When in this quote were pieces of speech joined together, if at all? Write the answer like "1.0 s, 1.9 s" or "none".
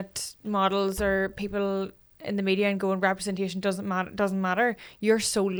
none